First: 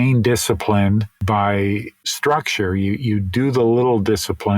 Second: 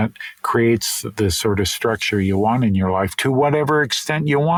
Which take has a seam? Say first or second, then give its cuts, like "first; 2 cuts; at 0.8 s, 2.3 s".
first; 2 cuts; at 1.1 s, 2.0 s